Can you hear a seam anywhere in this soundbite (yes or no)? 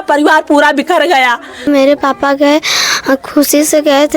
yes